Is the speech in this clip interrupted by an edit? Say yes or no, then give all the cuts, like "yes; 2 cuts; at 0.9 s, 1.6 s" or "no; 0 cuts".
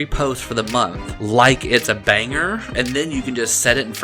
yes; 2 cuts; at 1.1 s, 2.8 s